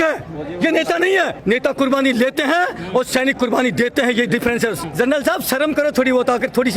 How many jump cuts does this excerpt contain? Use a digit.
2